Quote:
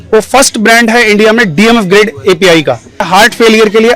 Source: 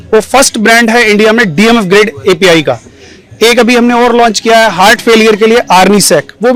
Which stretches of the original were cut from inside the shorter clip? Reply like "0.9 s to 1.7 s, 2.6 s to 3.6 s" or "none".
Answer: 3.0 s to 4.7 s